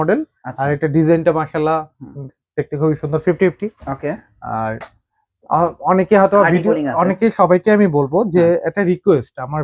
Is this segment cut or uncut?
uncut